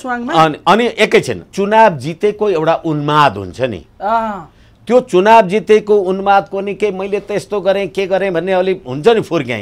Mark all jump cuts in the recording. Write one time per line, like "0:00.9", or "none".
0:01.5